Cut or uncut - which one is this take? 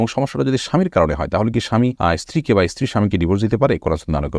cut